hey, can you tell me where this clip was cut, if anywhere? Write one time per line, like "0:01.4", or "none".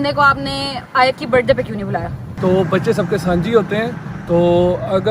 0:02.3